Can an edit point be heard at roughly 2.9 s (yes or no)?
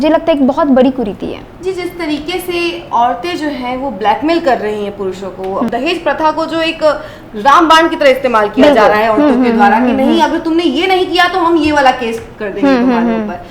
no